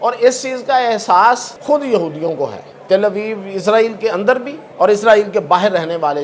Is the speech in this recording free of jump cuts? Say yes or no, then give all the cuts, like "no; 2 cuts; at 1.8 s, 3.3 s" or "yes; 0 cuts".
no; 3 cuts; at 1.5 s, 2.7 s, 4.6 s